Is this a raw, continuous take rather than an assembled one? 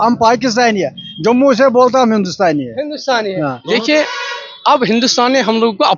no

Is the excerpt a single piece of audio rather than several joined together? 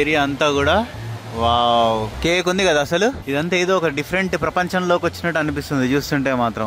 yes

